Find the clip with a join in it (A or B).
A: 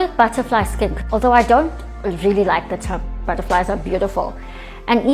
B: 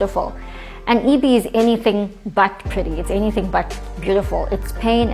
A